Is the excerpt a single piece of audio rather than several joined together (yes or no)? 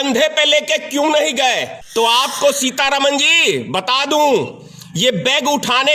no